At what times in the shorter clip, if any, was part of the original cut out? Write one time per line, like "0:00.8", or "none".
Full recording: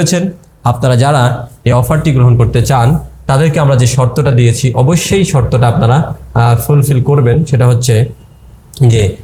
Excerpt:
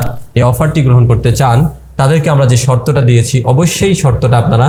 none